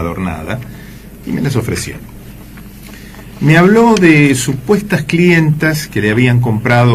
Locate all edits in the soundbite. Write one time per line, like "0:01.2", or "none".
0:05.6